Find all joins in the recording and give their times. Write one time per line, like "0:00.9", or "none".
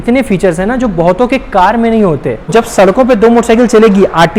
0:02.5